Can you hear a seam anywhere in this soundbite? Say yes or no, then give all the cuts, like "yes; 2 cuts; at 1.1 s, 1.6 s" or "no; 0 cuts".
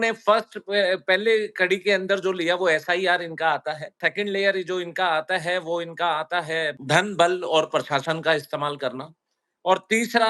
yes; 2 cuts; at 4.0 s, 6.8 s